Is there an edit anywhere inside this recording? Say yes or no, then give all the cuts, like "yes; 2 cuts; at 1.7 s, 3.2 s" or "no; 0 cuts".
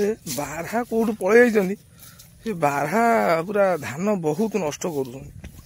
no; 0 cuts